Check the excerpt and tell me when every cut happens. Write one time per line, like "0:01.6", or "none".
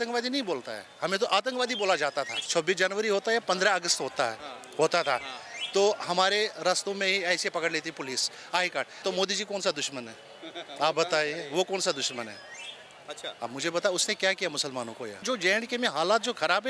0:02.4
0:08.9
0:15.2